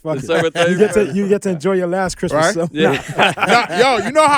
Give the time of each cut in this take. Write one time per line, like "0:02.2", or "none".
none